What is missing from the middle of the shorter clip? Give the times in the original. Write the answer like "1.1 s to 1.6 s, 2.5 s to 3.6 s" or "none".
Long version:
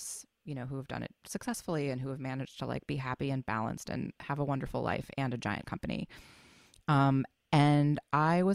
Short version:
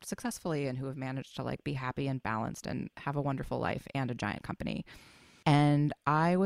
6.5 s to 7.4 s

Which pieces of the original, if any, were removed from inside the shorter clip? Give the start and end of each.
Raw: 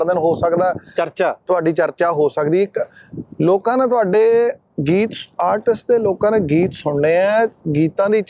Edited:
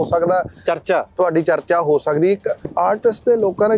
2.9 s to 5.2 s

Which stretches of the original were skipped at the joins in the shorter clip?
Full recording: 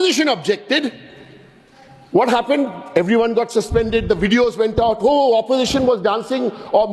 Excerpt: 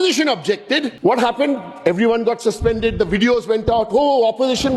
0.9 s to 2.0 s

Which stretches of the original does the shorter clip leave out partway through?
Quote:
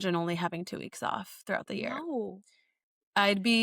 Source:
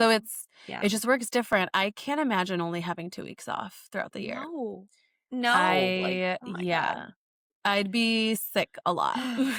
5.1 s to 7.2 s

